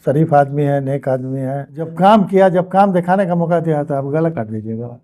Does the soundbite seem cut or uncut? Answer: cut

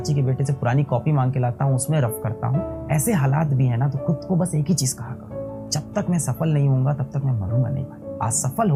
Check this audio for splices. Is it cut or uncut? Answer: uncut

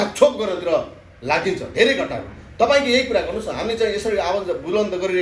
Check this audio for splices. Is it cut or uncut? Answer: uncut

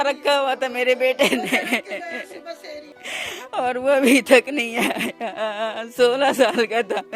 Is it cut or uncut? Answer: cut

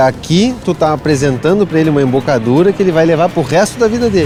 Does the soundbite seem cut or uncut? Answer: uncut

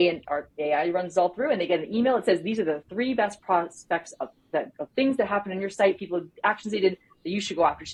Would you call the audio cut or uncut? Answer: uncut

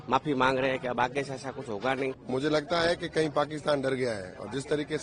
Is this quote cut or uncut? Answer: cut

